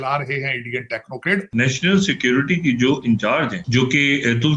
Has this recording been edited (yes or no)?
yes